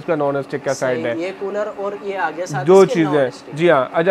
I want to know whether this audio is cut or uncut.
uncut